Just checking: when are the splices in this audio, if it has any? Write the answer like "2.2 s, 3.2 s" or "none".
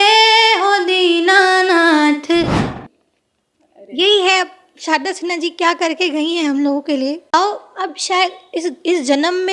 2.6 s, 7.3 s